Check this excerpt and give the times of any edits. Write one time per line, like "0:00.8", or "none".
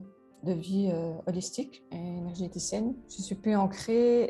0:01.8
0:03.1